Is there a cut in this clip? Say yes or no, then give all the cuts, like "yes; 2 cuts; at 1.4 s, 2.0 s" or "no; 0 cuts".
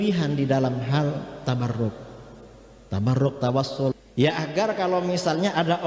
yes; 1 cut; at 3.9 s